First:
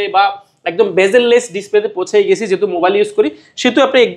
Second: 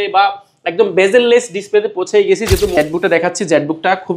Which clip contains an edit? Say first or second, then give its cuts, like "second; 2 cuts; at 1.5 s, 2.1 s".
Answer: second; 1 cut; at 2.8 s